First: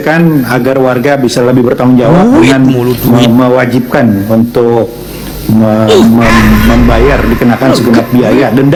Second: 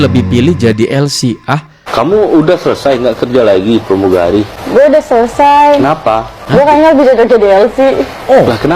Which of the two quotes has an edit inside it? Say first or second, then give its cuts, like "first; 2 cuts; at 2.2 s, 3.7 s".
second; 3 cuts; at 1.8 s, 4.6 s, 6.3 s